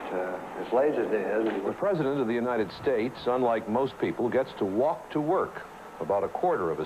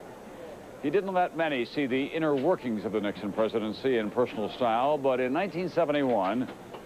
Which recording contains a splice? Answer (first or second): first